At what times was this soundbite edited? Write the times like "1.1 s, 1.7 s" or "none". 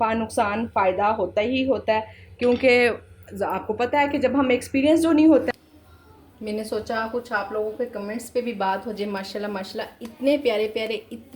5.5 s